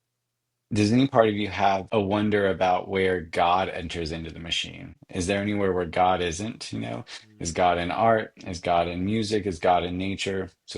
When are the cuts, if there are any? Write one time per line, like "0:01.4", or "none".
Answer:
0:01.8
0:05.0